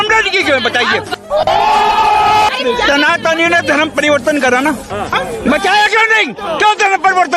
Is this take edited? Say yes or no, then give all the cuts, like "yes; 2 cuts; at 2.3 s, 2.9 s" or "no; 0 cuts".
yes; 4 cuts; at 1.1 s, 2.5 s, 5.1 s, 6.5 s